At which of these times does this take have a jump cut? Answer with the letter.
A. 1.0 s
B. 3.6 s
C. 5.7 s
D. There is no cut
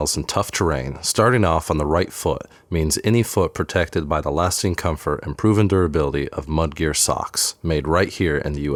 D